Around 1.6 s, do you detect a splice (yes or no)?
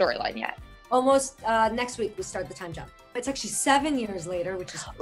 no